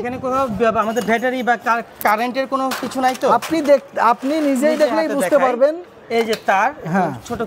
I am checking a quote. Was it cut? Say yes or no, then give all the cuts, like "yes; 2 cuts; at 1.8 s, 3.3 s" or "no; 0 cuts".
no; 0 cuts